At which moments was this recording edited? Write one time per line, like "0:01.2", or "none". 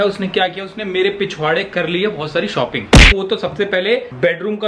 0:03.1